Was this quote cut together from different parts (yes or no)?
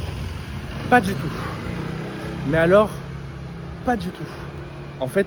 no